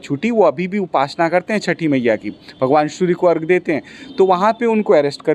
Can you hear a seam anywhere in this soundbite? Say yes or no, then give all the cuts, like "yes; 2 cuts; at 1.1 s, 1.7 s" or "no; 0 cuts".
no; 0 cuts